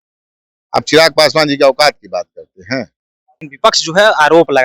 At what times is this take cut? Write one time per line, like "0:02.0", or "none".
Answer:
0:03.5